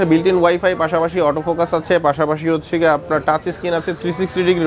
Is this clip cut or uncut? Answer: uncut